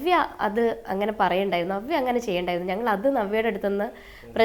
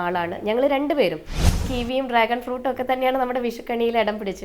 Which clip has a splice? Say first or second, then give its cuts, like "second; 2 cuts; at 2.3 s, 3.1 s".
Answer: second; 1 cut; at 1.6 s